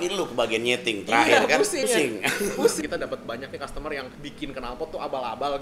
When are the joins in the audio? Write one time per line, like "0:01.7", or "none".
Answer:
0:01.8
0:02.8